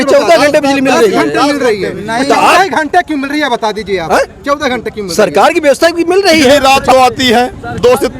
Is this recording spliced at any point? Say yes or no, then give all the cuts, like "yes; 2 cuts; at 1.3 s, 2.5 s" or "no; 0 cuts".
yes; 1 cut; at 6.6 s